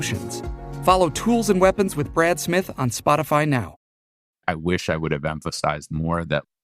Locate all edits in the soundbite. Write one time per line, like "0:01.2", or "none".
0:04.3